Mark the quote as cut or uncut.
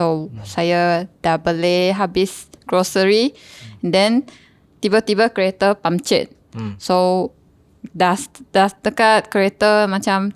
uncut